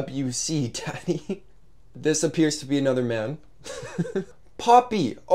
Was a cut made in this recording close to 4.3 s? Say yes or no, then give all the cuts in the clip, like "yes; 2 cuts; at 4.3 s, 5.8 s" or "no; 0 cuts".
yes; 1 cut; at 4.3 s